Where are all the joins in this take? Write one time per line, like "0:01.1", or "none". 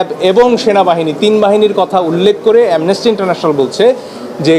none